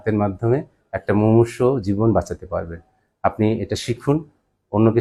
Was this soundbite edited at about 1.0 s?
no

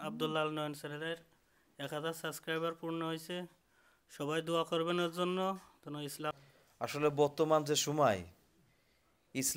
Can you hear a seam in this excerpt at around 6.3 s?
yes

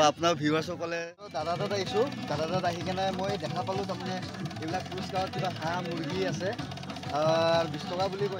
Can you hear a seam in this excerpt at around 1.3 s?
yes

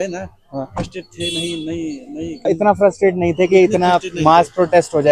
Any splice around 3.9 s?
no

